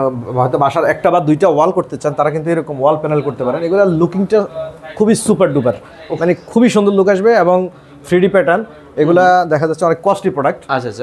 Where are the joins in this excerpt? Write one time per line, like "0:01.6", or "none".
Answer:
none